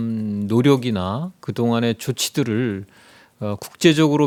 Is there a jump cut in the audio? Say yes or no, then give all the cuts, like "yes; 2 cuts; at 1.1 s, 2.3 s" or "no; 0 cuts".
no; 0 cuts